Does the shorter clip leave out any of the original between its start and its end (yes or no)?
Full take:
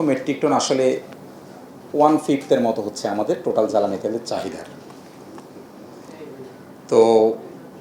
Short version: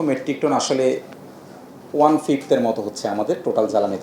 no